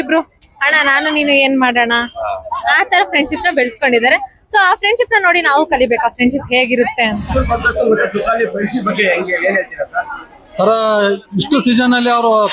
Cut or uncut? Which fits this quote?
cut